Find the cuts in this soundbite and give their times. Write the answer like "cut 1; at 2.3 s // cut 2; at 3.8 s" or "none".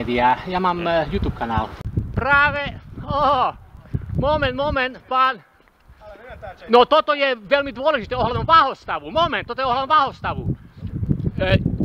cut 1; at 1.8 s